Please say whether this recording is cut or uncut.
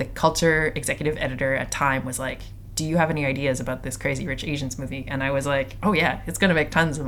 uncut